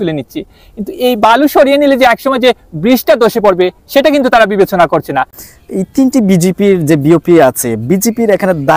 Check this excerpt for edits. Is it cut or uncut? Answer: cut